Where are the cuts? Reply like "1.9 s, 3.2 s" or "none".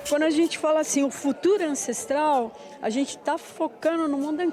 none